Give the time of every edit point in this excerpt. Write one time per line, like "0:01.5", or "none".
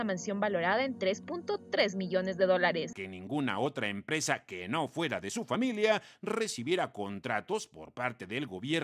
0:02.9